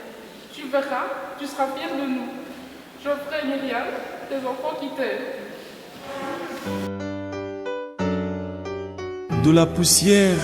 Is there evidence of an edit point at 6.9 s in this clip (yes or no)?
yes